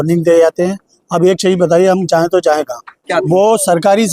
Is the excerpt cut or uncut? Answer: cut